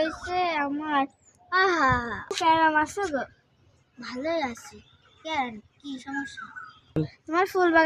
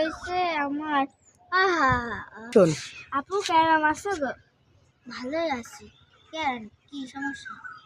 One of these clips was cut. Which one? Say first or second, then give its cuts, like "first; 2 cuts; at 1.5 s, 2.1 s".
first; 1 cut; at 2.3 s